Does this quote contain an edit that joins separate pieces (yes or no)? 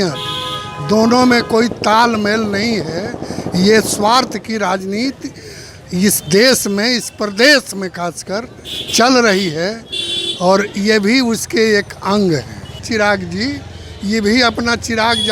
no